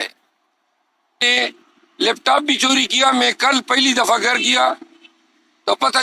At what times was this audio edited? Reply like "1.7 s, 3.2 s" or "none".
1.3 s